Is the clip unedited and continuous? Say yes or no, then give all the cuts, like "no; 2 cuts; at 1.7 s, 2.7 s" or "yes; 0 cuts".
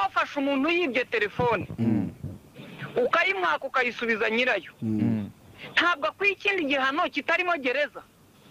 yes; 0 cuts